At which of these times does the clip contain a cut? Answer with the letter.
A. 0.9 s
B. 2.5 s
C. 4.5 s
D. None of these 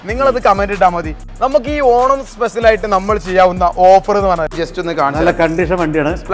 C